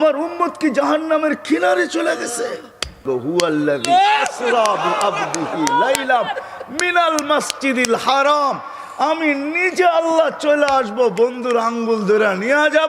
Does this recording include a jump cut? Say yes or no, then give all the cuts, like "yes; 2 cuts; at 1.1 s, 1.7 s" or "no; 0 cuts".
yes; 1 cut; at 3.0 s